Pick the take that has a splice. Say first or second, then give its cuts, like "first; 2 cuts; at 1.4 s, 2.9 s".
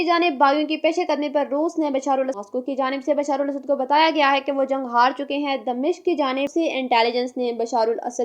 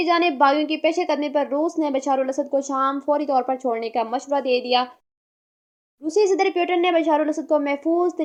first; 2 cuts; at 2.3 s, 6.5 s